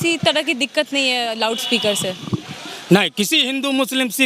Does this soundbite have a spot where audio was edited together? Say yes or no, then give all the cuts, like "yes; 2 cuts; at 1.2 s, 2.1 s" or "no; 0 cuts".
no; 0 cuts